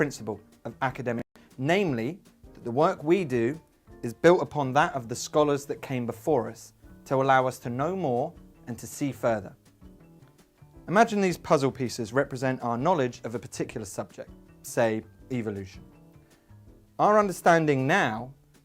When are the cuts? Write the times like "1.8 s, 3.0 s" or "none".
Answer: 1.2 s